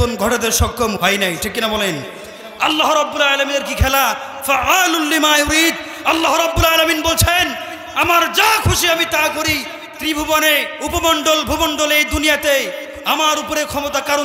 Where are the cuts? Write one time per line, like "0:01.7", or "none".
0:01.0
0:10.7